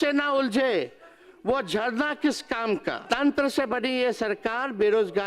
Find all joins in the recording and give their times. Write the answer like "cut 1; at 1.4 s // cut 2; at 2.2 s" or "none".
cut 1; at 3.0 s